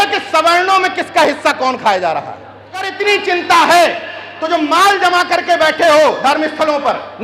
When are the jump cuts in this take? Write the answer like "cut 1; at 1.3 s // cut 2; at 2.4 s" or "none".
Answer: cut 1; at 2.9 s